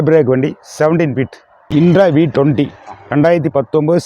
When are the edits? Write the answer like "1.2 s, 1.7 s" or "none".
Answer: 1.7 s